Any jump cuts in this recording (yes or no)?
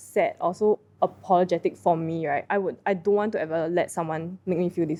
no